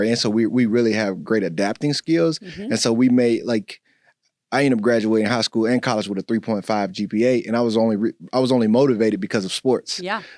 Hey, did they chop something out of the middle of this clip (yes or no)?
no